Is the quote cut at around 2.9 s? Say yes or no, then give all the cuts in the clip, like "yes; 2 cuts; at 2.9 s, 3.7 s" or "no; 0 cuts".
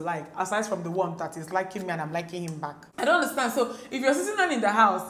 yes; 1 cut; at 2.9 s